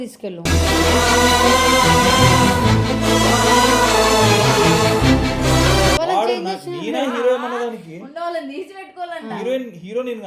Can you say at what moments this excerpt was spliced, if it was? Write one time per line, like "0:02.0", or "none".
0:06.0